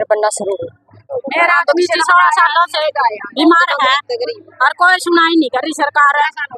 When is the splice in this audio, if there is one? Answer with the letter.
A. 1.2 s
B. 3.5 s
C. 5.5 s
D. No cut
A